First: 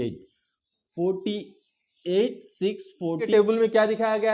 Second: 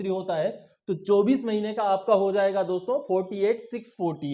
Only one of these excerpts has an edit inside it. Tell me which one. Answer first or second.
first